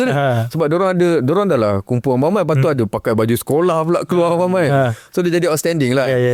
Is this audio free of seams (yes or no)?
yes